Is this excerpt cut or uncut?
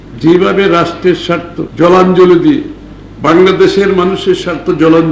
cut